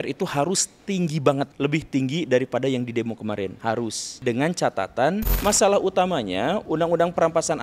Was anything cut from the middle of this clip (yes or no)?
yes